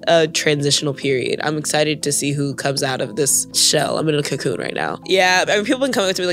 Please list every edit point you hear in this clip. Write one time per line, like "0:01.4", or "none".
0:03.6
0:04.9